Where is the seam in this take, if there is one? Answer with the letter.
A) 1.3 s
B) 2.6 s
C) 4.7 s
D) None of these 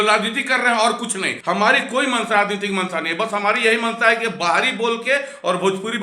A